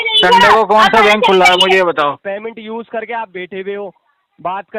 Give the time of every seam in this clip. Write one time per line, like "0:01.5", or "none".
0:02.2